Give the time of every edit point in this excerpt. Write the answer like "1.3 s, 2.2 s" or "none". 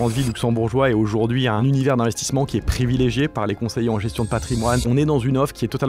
1.6 s, 4.8 s